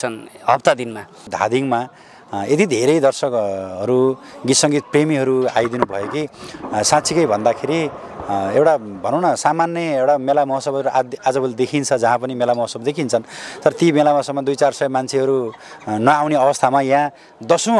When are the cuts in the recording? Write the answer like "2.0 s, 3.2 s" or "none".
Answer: 1.3 s